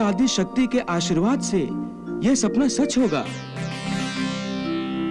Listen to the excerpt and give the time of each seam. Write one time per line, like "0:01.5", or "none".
none